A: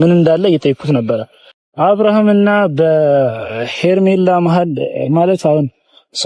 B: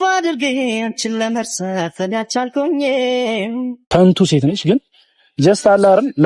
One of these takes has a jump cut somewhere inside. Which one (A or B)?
B